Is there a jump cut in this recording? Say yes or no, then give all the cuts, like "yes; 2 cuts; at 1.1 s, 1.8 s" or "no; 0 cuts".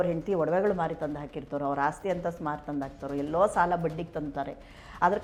no; 0 cuts